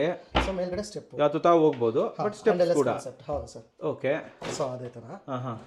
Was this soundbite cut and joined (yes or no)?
no